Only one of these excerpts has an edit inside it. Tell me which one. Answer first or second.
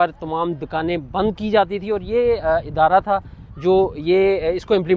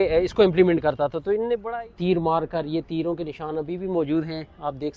second